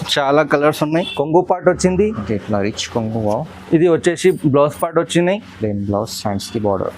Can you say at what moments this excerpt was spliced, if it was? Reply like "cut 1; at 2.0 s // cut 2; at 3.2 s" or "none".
cut 1; at 1.1 s